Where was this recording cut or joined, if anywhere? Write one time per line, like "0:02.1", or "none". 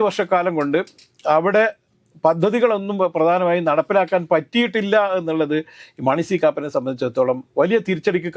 none